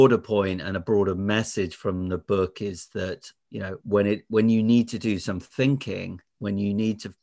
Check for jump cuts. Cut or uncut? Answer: cut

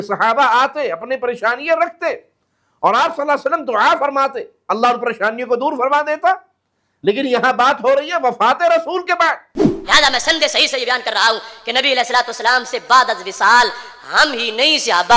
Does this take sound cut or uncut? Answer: cut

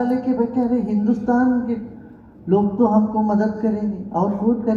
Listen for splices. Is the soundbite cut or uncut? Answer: uncut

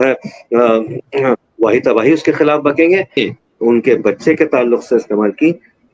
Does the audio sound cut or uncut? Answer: cut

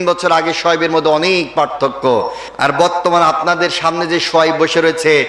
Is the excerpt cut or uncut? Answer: cut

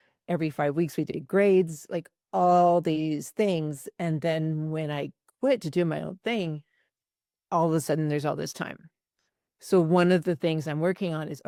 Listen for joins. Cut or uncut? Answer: uncut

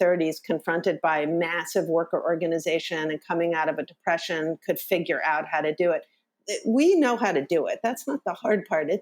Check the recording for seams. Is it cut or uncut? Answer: uncut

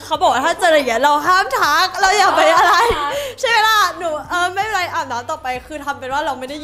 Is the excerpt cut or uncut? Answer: uncut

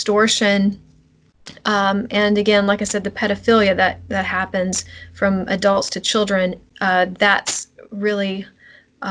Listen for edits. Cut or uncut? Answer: uncut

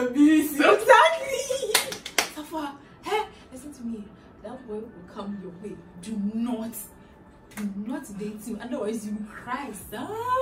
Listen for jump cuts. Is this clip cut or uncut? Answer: uncut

